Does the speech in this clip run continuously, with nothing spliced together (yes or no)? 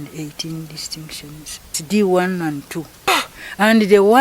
no